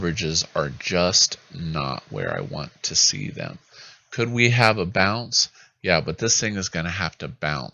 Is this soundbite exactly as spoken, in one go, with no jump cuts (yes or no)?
yes